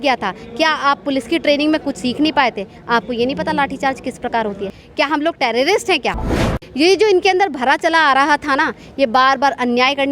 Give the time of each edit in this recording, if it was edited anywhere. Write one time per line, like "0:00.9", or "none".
0:04.8
0:06.4